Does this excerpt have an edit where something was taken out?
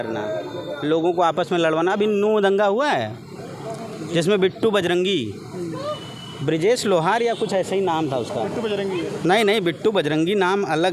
no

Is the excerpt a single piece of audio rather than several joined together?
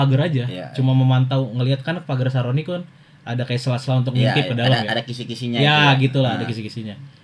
yes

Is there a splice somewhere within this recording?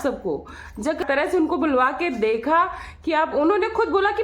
yes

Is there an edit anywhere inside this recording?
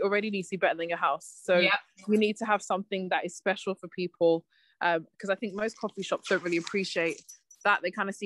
no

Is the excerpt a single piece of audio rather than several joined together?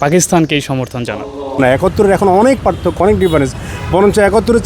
no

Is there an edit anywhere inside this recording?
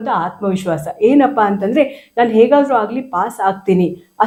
no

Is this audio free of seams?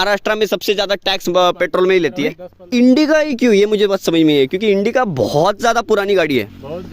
no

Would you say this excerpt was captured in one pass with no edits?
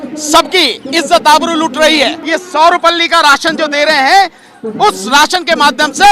no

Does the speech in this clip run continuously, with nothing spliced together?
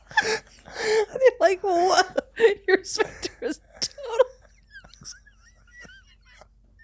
yes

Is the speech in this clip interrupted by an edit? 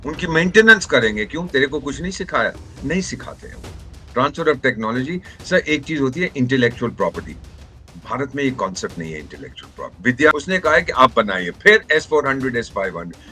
yes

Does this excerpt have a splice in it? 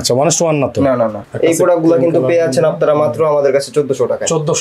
yes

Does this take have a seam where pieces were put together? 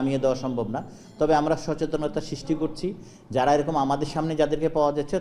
no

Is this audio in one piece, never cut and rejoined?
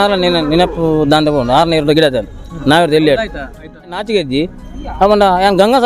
no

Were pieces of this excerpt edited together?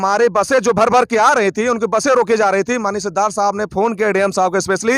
no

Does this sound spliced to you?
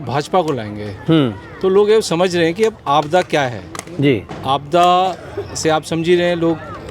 no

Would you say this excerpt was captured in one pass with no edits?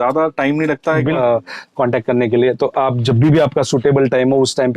no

